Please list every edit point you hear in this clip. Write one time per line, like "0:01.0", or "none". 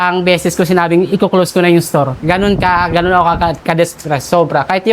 none